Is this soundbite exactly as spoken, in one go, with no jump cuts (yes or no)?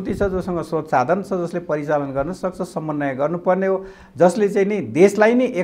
yes